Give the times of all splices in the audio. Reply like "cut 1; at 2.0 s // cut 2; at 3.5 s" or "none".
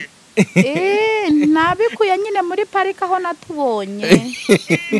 none